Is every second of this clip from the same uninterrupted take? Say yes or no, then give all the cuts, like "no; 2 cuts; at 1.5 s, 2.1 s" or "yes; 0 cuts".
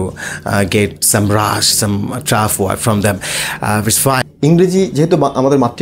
no; 1 cut; at 4.3 s